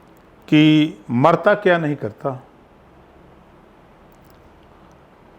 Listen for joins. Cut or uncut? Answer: uncut